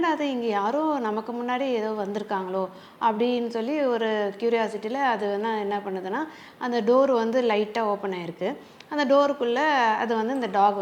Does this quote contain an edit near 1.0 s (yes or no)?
no